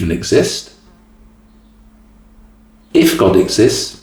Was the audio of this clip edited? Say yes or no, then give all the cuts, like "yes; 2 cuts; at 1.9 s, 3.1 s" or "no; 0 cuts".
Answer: no; 0 cuts